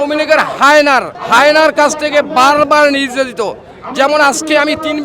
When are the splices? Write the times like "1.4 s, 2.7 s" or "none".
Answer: 1.2 s